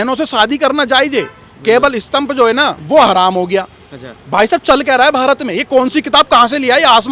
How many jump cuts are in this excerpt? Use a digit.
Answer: 0